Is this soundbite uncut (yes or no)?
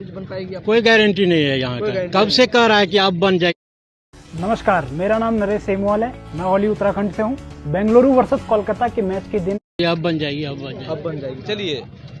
yes